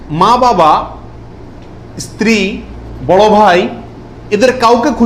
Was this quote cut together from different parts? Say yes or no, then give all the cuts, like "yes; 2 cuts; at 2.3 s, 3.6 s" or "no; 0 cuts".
no; 0 cuts